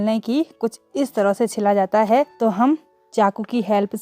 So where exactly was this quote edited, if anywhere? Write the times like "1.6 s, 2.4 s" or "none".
2.3 s